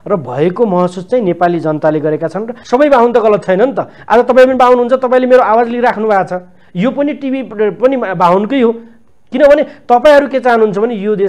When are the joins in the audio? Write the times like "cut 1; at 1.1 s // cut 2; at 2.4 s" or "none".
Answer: cut 1; at 2.6 s